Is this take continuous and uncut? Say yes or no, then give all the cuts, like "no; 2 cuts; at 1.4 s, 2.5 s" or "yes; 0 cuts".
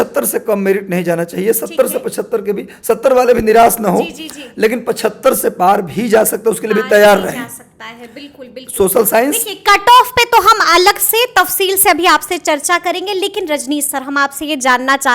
yes; 0 cuts